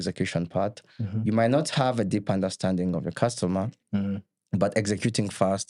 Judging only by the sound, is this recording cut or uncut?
uncut